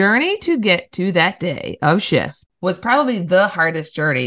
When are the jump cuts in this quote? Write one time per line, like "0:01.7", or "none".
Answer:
0:02.4